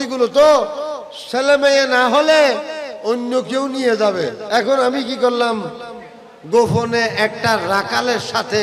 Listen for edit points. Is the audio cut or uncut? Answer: cut